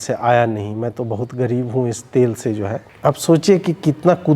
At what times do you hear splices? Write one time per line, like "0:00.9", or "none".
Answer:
0:02.9